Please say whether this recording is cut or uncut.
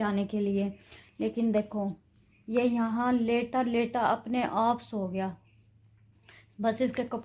uncut